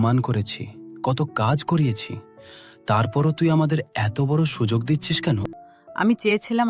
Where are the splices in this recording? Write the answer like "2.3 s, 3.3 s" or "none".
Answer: 5.6 s